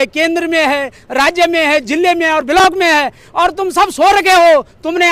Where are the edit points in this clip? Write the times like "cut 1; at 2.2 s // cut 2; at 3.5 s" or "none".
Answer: none